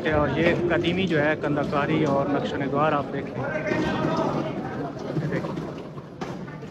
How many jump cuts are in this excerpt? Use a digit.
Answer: 0